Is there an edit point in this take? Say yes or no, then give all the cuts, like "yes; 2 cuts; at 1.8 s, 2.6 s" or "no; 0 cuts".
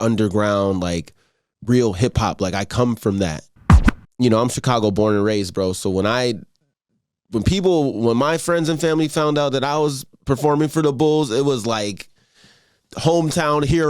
yes; 1 cut; at 3.6 s